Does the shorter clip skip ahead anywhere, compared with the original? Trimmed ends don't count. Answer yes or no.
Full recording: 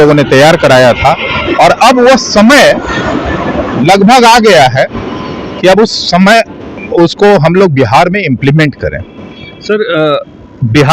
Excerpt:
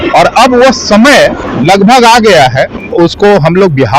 yes